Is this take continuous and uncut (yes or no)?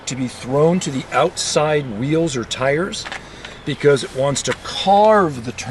yes